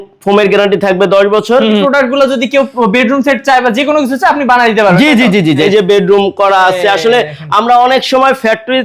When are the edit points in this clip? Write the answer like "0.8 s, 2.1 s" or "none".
1.8 s, 5.6 s